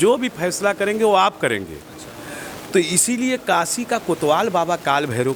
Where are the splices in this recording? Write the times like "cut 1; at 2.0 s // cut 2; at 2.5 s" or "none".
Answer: none